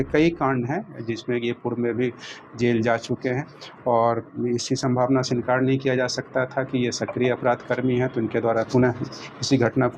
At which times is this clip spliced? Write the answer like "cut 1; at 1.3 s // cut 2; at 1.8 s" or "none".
none

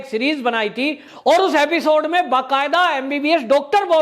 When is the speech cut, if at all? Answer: cut 1; at 1.0 s

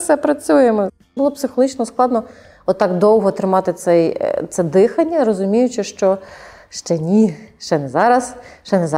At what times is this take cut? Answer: cut 1; at 1.1 s

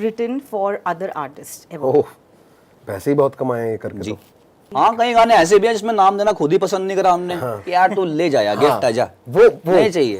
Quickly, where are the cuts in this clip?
cut 1; at 4.6 s

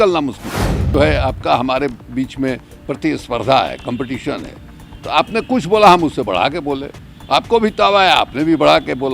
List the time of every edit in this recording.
cut 1; at 0.9 s

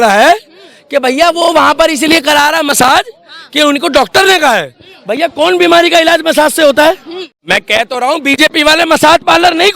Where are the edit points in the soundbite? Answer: cut 1; at 7.4 s

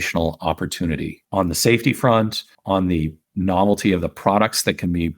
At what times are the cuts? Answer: cut 1; at 1.2 s // cut 2; at 2.5 s // cut 3; at 3.2 s

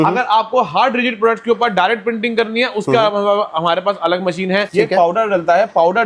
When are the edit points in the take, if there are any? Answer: cut 1; at 4.7 s

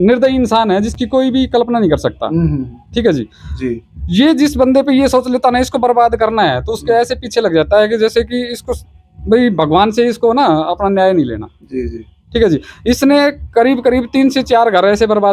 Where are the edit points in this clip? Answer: none

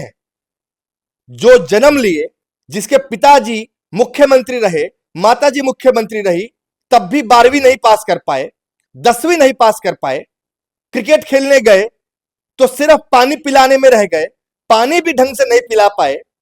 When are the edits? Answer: none

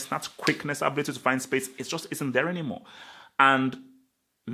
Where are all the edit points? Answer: none

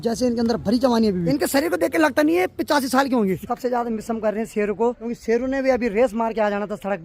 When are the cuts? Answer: cut 1; at 1.2 s // cut 2; at 3.5 s // cut 3; at 5.1 s

